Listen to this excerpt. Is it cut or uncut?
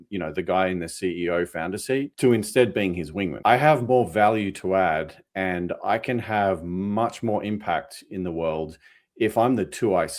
cut